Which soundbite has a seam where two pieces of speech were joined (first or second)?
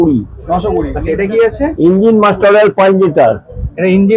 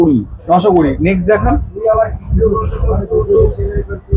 first